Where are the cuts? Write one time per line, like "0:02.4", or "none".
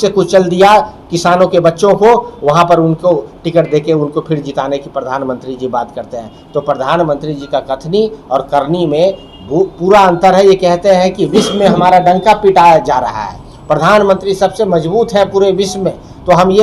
none